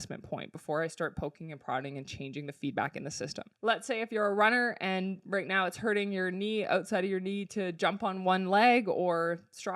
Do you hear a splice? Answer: yes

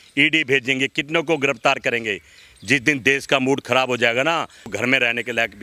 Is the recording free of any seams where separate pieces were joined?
yes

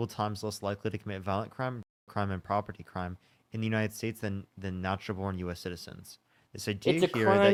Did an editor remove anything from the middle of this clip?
no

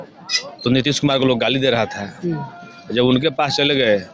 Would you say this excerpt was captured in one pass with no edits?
yes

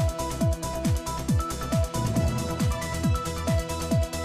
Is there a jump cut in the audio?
no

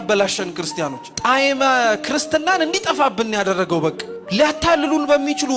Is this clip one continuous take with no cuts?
no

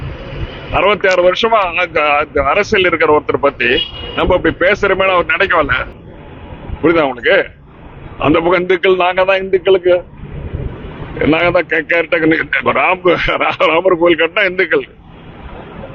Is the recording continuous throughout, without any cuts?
no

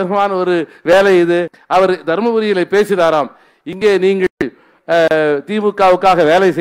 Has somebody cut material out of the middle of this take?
yes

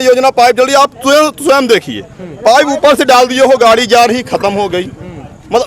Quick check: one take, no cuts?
yes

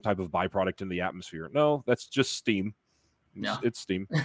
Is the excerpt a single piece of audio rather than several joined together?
yes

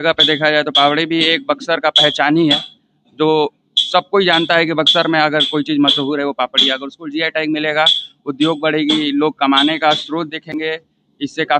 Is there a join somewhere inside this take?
no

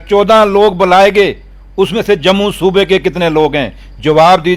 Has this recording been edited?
no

